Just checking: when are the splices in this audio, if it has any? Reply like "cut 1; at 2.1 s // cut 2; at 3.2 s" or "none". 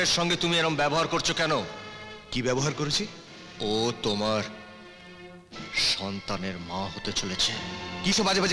none